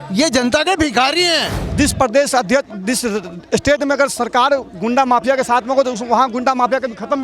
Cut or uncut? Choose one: cut